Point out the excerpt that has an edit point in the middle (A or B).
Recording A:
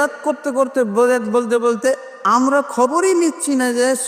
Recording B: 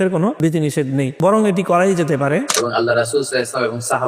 B